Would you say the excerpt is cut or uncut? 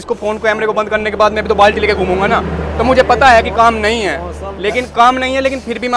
uncut